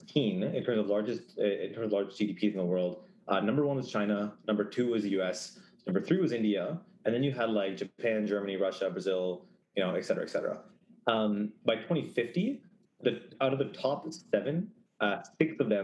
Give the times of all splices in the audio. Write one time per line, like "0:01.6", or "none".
none